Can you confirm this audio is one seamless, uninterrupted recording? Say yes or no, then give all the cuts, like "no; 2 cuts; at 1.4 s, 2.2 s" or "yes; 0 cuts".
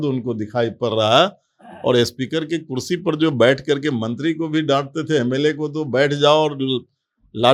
yes; 0 cuts